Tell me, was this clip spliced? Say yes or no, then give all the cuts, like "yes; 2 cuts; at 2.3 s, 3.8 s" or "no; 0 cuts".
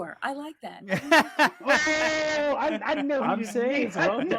no; 0 cuts